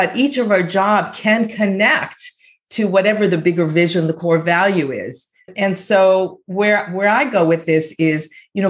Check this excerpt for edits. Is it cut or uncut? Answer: cut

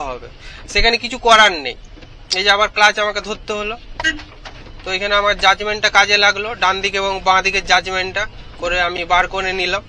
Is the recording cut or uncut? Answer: uncut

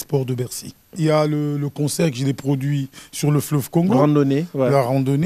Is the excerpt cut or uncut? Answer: cut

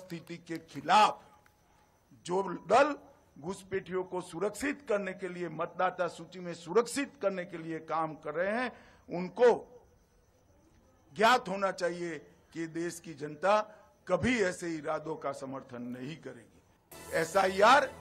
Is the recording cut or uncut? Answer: cut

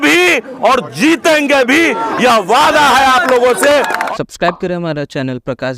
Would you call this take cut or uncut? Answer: cut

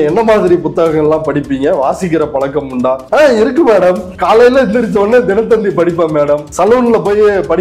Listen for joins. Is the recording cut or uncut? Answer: cut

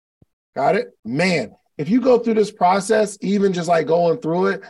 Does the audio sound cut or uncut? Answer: cut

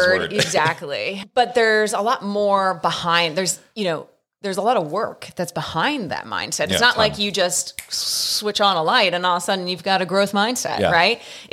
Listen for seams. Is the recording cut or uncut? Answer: cut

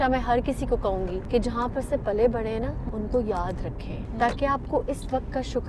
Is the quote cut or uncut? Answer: cut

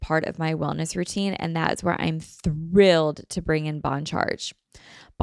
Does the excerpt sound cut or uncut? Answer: uncut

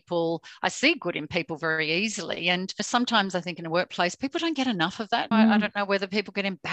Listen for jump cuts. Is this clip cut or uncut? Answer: uncut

